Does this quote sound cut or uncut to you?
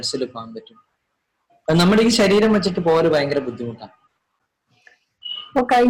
uncut